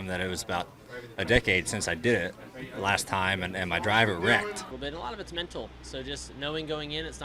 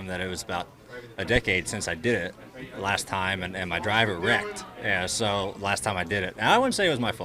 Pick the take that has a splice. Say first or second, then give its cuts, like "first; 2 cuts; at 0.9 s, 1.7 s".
first; 1 cut; at 4.7 s